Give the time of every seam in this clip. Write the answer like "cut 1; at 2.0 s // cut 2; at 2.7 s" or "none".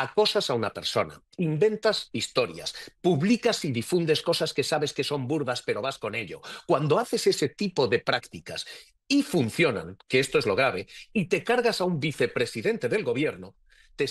none